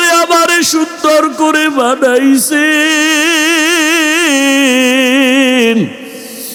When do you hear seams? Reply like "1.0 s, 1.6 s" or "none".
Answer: none